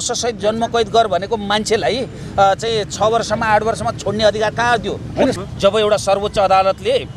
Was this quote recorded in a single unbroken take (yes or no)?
no